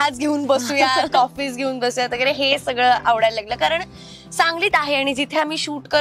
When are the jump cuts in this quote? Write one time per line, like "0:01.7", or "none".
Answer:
none